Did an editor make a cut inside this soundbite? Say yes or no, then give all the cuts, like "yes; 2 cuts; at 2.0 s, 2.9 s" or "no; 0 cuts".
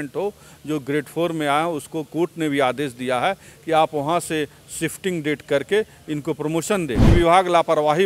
yes; 1 cut; at 7.1 s